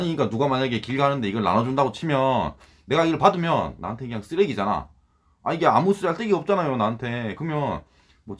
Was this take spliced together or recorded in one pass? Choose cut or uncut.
uncut